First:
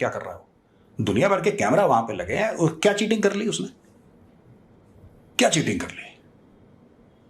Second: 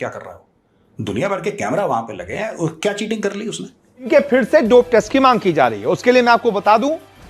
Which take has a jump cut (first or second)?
second